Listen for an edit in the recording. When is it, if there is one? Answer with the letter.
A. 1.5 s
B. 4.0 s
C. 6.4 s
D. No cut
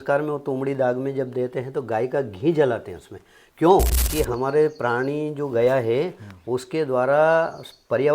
B